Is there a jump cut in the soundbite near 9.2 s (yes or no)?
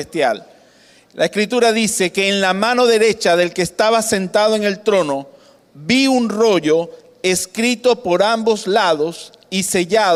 no